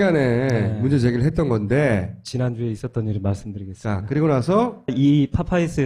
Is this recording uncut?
no; 1 cut; at 2.8 s

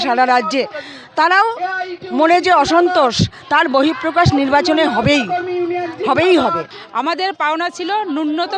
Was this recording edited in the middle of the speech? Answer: no; 0 cuts

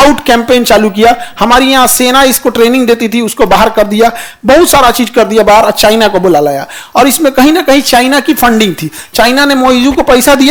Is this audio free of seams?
yes; 0 cuts

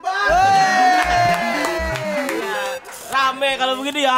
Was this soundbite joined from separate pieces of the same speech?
no; 0 cuts

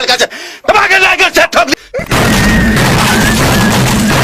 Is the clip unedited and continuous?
no; 1 cut; at 1.9 s

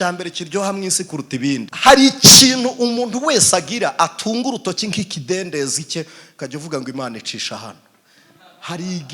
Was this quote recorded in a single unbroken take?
no; 1 cut; at 1.7 s

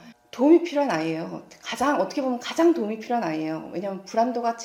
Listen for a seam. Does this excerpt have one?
no; 0 cuts

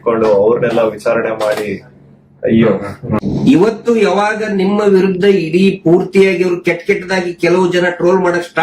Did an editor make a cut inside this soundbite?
yes; 1 cut; at 3.2 s

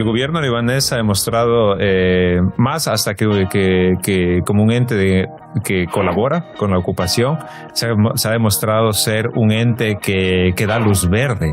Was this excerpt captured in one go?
yes; 0 cuts

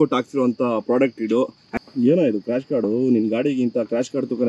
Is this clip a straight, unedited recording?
no; 1 cut; at 1.7 s

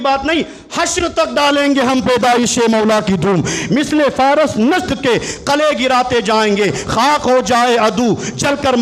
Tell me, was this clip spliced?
no; 0 cuts

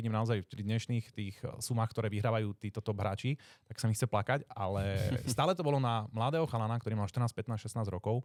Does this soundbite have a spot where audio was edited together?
no; 0 cuts

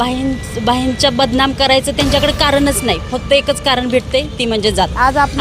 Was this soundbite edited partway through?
no; 0 cuts

